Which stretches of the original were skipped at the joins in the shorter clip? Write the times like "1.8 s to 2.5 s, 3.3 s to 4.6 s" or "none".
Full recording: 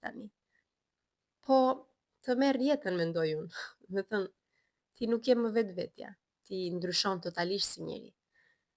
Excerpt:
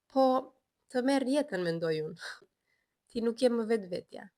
3.8 s to 4.3 s